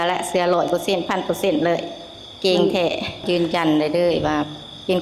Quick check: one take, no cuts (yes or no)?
no